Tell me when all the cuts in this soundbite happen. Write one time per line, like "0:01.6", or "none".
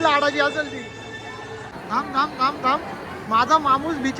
0:01.8